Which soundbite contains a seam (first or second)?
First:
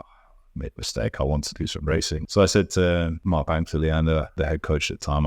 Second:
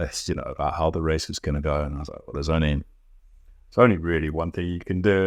first